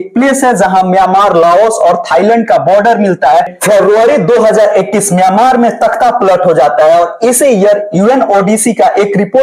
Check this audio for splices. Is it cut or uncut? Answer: cut